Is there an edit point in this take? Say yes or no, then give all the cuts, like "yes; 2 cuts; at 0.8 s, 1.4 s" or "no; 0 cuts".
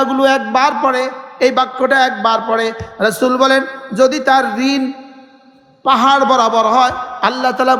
no; 0 cuts